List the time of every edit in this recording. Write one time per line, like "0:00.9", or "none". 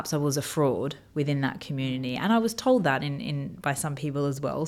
none